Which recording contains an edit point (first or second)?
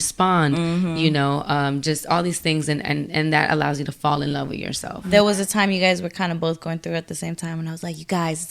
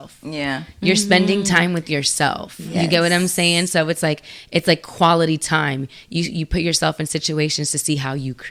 first